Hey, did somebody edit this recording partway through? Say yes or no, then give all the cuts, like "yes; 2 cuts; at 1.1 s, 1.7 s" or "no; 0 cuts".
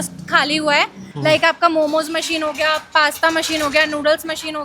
yes; 1 cut; at 1.0 s